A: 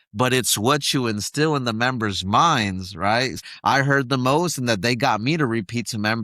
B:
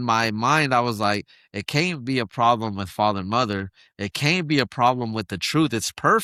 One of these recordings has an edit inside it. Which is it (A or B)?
A